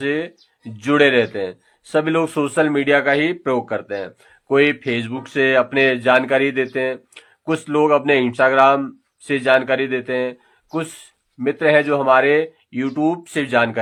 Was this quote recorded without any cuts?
yes; 0 cuts

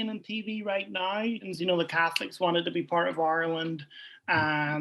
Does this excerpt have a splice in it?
yes; 1 cut; at 1.5 s

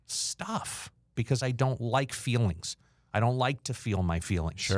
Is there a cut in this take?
yes; 1 cut; at 1.1 s

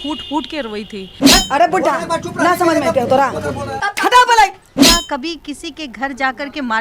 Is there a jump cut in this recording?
yes; 2 cuts; at 1.1 s, 4.8 s

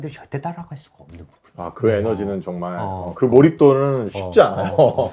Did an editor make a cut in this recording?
no; 0 cuts

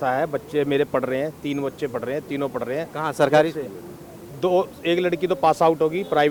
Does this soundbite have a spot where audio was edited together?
no; 0 cuts

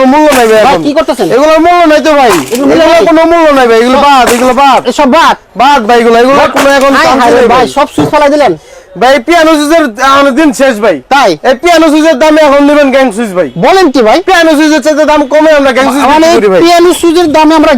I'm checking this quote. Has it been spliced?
no; 0 cuts

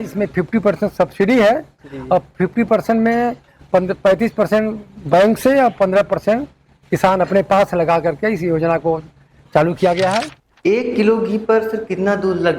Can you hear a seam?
yes; 1 cut; at 10.4 s

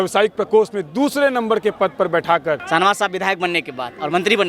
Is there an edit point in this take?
yes; 1 cut; at 2.6 s

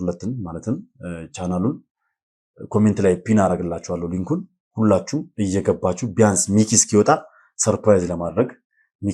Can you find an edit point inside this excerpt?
no; 0 cuts

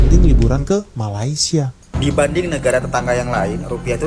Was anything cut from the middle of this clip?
yes; 1 cut; at 1.8 s

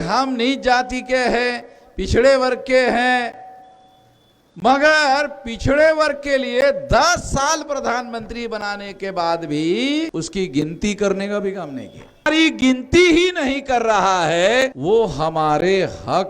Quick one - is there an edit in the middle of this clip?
yes; 3 cuts; at 10.1 s, 12.3 s, 14.8 s

